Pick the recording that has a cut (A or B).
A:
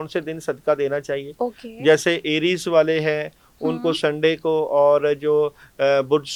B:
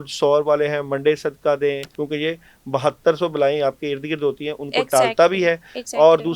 B